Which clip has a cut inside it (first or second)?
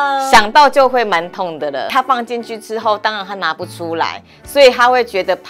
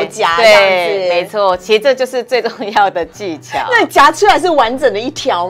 first